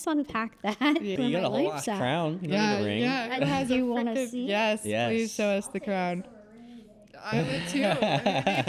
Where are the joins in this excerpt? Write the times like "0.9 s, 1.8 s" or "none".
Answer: 1.1 s